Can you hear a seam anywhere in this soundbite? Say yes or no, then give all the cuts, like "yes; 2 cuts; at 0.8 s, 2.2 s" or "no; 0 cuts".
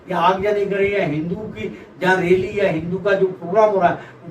no; 0 cuts